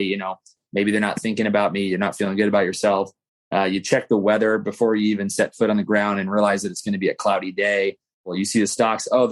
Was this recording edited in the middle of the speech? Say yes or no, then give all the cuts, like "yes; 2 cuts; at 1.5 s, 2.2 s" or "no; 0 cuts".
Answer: yes; 1 cut; at 8.3 s